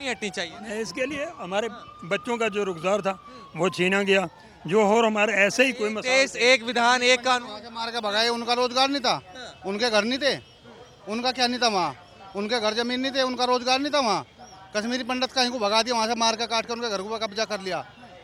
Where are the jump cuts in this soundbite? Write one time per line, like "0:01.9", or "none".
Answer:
none